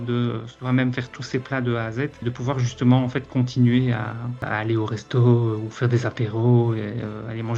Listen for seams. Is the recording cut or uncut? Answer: uncut